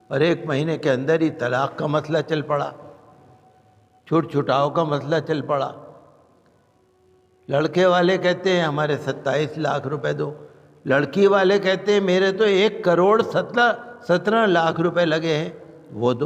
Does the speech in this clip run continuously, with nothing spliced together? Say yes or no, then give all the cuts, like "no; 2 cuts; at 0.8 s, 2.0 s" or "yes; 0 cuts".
yes; 0 cuts